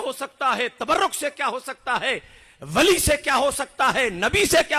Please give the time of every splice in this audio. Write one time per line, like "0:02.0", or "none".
none